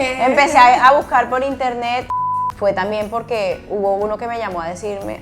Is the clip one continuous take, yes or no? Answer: no